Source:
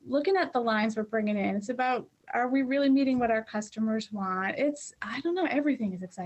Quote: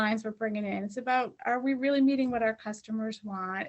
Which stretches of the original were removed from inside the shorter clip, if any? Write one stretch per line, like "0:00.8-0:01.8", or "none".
0:02.1-0:02.2